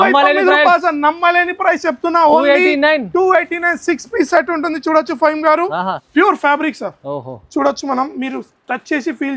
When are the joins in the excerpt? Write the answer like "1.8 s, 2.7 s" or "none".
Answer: 6.0 s